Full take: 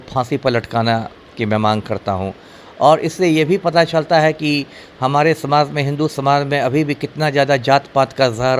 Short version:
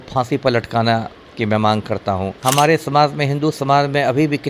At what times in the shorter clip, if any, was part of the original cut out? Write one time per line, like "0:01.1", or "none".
0:02.3